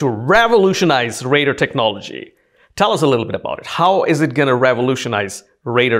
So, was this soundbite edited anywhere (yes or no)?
no